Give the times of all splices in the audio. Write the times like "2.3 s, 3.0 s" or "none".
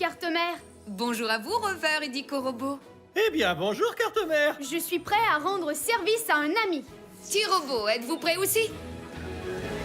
8.8 s